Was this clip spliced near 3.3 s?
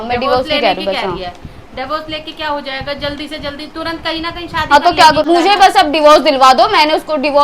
no; 1 cut; at 5.2 s

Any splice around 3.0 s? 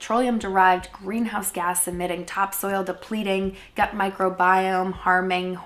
no; 0 cuts

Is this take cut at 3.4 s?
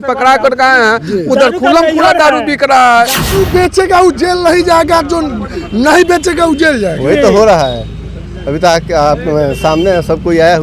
yes; 1 cut; at 3.4 s

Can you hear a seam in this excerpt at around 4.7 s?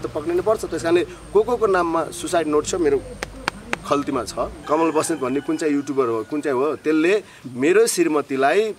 yes; 1 cut; at 4.7 s

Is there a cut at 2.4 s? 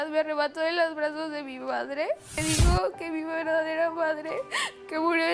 yes; 1 cut; at 2.4 s

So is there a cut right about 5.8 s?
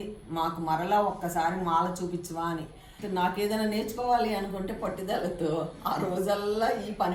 no; 1 cut; at 2.9 s

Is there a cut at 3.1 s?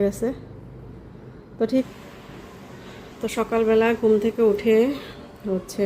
no; 1 cut; at 1.9 s

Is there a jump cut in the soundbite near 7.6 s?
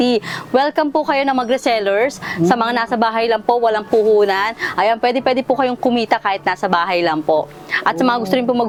no; 0 cuts

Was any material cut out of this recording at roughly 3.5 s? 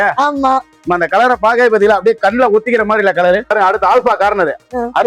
yes; 1 cut; at 3.5 s

